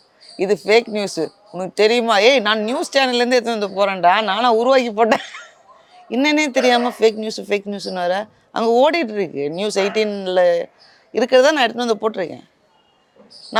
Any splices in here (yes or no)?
no